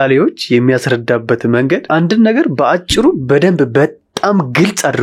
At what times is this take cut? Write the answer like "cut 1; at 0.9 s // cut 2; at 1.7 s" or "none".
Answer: cut 1; at 1.8 s